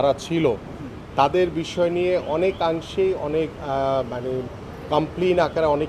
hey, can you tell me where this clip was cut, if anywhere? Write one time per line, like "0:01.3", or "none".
none